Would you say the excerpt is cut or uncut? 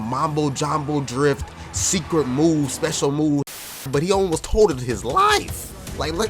cut